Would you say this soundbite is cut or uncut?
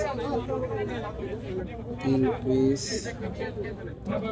uncut